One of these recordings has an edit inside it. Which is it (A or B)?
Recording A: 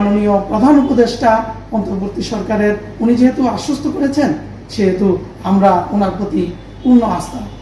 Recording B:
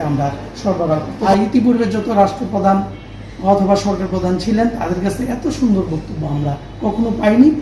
B